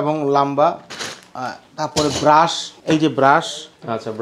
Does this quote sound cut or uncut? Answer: cut